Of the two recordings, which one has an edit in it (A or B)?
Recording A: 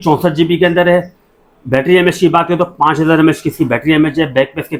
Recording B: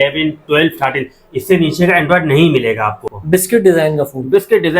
B